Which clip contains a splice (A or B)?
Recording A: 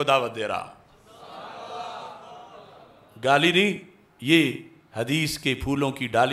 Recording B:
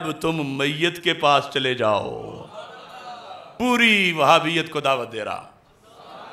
B